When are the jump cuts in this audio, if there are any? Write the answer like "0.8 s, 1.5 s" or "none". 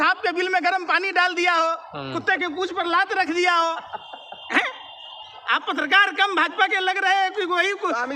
none

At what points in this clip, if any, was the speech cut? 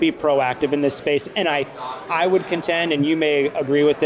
none

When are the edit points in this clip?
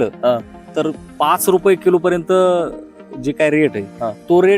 none

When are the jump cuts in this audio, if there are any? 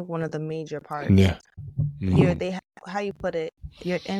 none

